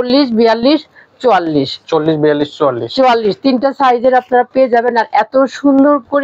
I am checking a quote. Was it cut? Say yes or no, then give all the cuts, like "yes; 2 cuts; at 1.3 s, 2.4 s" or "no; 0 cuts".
no; 0 cuts